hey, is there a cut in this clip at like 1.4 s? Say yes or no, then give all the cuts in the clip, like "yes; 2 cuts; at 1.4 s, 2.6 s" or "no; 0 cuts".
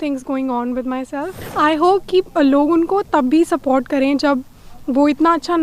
yes; 1 cut; at 1.4 s